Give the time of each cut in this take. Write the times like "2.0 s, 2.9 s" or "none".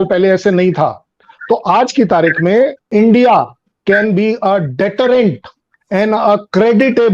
2.8 s